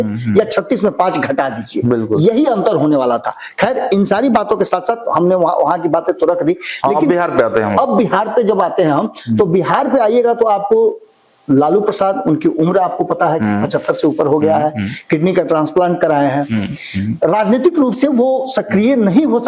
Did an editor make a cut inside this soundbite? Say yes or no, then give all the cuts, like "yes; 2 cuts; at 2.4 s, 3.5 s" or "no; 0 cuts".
no; 0 cuts